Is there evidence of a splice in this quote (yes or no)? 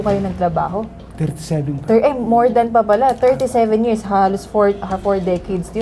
no